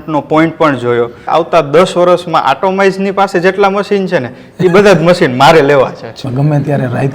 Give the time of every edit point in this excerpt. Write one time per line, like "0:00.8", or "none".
0:01.3
0:06.1